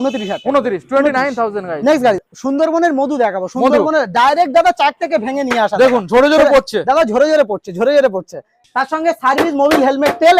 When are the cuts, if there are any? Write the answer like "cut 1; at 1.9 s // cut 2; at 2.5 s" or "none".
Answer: cut 1; at 2.3 s // cut 2; at 8.6 s